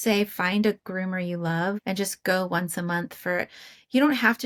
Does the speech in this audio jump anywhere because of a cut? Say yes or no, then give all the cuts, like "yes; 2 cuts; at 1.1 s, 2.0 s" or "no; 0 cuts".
no; 0 cuts